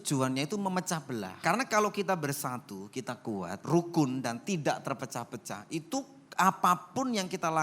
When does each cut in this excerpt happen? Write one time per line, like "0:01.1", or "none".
0:01.4
0:03.6